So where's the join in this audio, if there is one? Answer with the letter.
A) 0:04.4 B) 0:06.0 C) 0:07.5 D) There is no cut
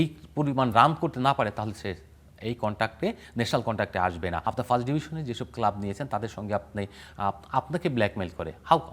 A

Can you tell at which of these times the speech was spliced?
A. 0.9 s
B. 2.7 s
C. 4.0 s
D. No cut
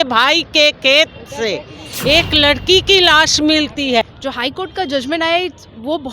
C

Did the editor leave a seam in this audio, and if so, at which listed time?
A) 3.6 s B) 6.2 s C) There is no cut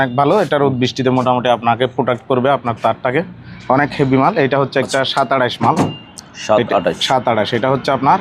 C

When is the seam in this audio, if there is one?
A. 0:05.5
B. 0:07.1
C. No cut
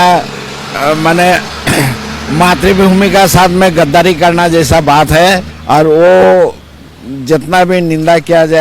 A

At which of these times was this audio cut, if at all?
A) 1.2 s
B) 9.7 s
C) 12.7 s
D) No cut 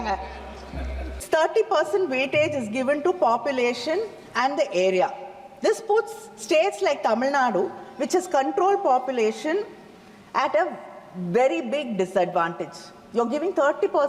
A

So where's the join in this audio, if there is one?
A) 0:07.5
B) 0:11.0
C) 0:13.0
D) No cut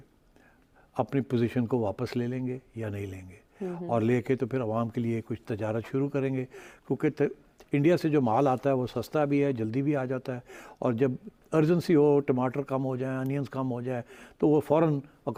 D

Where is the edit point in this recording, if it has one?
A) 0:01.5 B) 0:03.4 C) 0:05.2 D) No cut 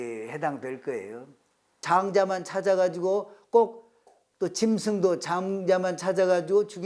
A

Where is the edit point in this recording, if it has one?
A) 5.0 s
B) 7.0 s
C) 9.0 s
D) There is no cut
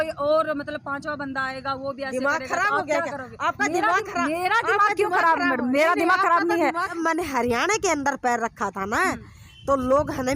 B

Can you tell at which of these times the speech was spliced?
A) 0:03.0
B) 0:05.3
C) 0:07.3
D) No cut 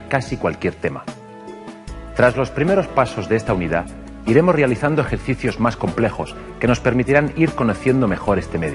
A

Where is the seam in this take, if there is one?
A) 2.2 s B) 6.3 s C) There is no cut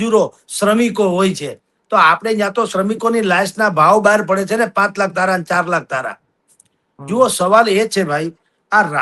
C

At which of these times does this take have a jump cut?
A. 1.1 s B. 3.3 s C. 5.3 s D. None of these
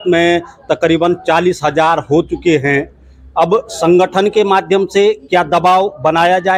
D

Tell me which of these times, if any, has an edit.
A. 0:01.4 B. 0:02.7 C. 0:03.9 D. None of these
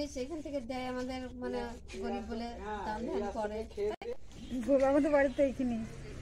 C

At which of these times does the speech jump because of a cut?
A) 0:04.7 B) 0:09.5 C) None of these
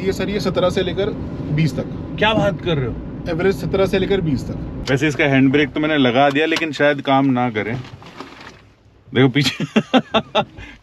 A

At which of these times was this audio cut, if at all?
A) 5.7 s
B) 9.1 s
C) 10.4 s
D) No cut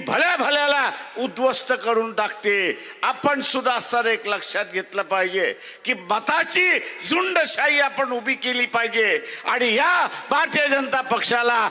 D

